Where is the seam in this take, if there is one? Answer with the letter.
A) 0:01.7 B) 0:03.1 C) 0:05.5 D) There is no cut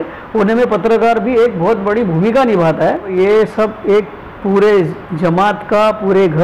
B